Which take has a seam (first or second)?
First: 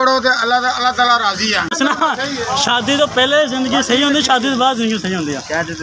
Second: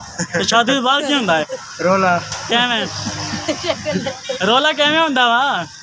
first